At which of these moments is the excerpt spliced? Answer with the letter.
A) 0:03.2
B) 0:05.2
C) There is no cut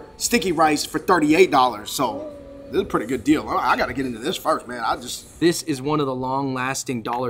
B